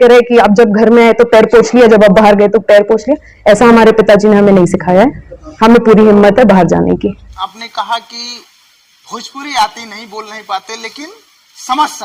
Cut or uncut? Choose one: uncut